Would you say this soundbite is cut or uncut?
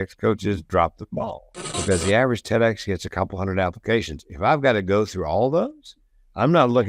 cut